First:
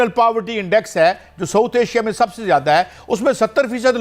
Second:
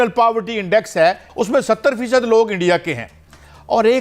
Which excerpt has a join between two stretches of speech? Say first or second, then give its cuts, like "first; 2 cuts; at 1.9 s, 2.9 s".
second; 1 cut; at 1.3 s